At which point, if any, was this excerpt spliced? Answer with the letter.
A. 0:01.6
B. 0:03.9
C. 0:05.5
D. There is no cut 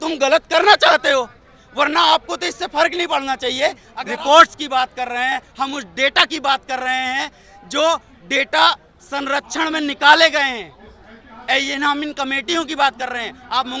B